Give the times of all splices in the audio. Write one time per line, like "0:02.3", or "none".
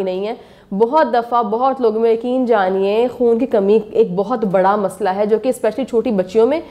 none